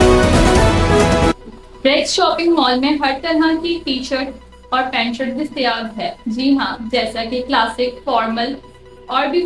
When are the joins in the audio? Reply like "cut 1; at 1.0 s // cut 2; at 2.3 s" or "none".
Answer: cut 1; at 1.4 s